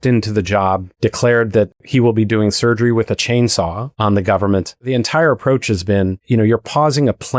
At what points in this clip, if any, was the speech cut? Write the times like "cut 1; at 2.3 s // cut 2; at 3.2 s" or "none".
cut 1; at 0.9 s // cut 2; at 3.8 s // cut 3; at 4.7 s // cut 4; at 6.2 s